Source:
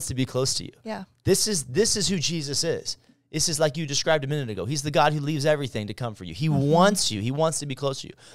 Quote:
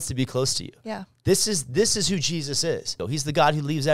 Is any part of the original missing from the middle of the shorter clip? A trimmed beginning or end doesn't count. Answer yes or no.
yes